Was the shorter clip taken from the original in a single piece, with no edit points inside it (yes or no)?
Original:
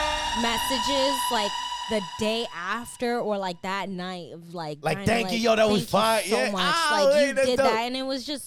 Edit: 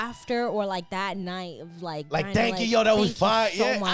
yes